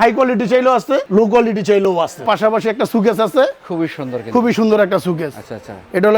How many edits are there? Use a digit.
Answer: 2